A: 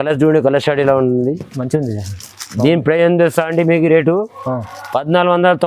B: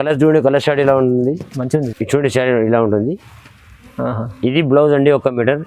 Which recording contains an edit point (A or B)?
B